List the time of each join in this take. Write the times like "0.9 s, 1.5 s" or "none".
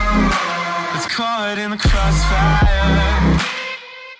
0.9 s